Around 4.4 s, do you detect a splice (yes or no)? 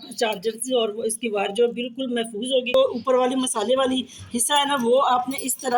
no